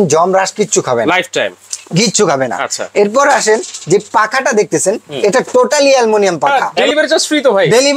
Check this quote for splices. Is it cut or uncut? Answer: cut